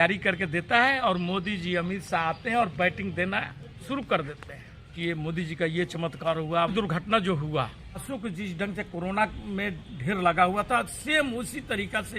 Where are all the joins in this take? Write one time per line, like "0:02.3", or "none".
0:04.9
0:06.7
0:08.0